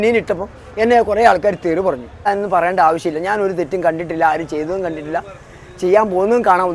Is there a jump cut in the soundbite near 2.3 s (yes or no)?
yes